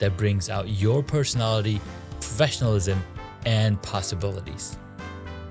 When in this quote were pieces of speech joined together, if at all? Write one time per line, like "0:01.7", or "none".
0:04.5